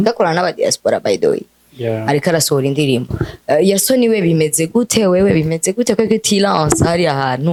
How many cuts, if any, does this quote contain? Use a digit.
0